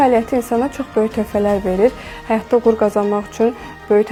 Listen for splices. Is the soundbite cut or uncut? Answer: uncut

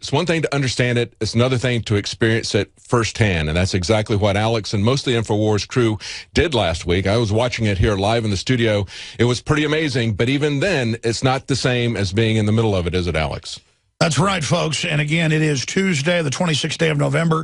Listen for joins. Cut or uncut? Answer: uncut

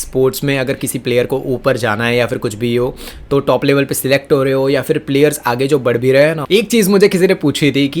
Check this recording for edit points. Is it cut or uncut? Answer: cut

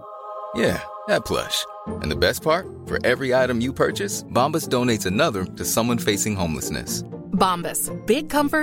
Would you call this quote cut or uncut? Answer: uncut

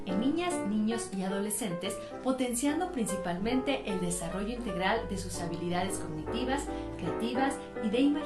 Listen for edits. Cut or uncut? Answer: cut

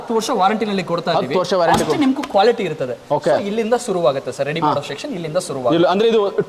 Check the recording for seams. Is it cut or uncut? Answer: uncut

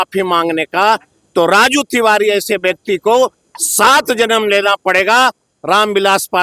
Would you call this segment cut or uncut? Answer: uncut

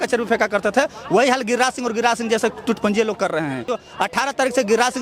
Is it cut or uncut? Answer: cut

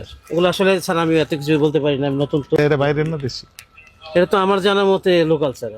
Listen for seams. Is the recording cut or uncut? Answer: cut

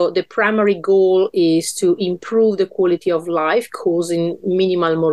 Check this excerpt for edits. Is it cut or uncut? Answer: uncut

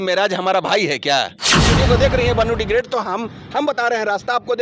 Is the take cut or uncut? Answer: cut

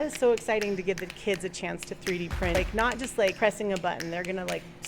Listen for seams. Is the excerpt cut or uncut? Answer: cut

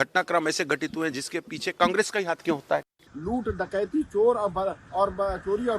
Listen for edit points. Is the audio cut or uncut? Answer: cut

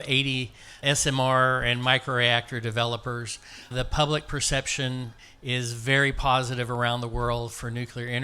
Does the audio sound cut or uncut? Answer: cut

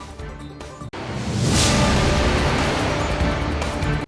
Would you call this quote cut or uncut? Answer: uncut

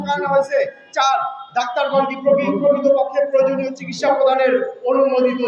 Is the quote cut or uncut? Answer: uncut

